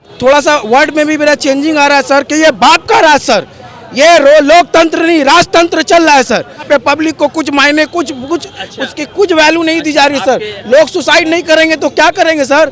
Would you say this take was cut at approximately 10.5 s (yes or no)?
no